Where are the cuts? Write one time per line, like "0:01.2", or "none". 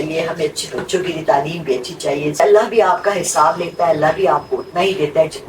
0:02.4